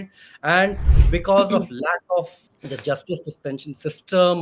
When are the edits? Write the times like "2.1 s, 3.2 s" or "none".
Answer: 2.4 s